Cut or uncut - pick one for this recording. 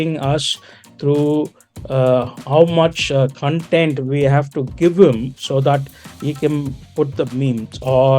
uncut